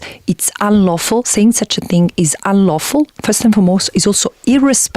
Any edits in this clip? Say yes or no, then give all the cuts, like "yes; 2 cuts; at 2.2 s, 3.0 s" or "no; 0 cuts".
no; 0 cuts